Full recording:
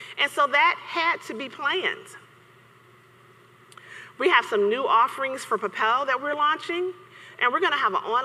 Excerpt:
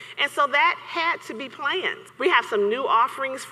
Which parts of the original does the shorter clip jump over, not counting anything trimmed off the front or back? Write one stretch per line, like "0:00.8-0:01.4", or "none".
0:02.0-0:04.0

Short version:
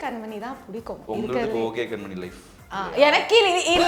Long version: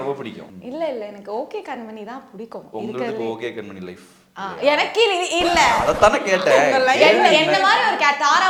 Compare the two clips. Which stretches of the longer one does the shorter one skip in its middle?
none

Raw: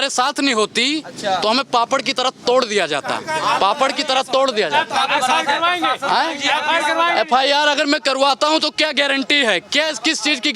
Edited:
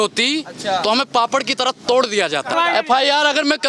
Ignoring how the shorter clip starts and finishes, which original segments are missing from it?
0:03.1-0:07.0

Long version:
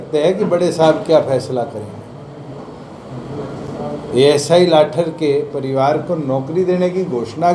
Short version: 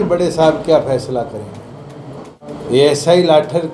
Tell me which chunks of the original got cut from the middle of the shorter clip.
0:02.9-0:03.9

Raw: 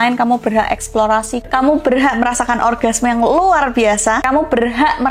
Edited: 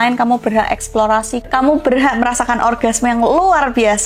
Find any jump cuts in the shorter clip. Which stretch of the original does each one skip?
none

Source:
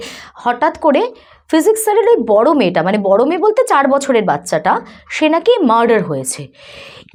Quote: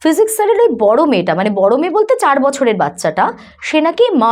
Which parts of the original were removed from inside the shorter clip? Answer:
none

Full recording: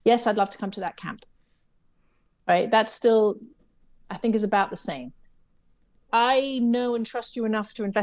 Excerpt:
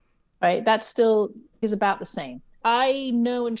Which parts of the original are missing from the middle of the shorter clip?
0:03.7-0:04.3
0:05.1-0:05.9

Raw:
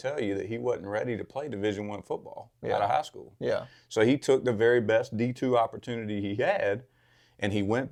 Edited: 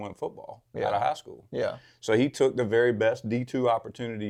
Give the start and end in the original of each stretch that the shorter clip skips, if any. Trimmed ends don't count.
none

